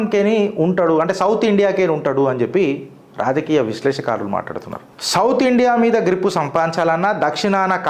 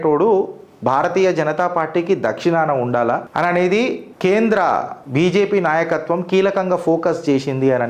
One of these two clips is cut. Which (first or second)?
second